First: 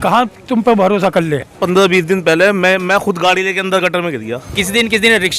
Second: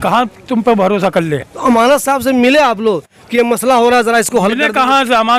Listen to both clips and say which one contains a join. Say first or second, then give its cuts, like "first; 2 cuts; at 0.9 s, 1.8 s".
first; 2 cuts; at 1.5 s, 4.5 s